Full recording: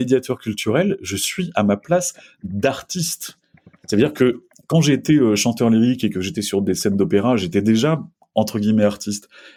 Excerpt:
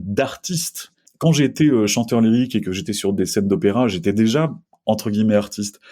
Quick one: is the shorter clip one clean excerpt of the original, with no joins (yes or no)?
no